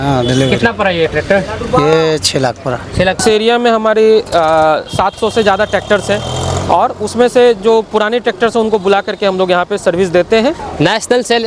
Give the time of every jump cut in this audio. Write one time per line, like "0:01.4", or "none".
0:03.2
0:10.6